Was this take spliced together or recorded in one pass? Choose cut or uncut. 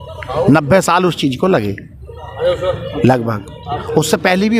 uncut